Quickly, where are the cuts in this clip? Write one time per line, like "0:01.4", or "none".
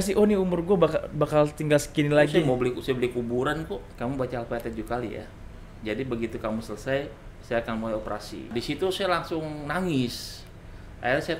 0:03.9
0:08.5